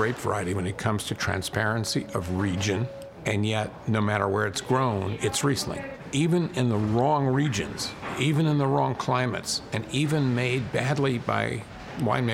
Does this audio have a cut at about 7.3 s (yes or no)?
no